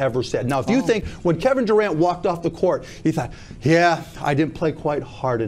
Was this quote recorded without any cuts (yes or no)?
yes